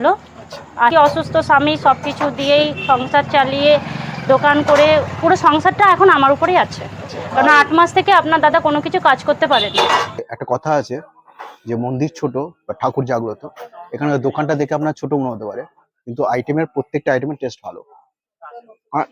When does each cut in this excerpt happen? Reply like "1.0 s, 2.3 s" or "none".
0.9 s, 10.3 s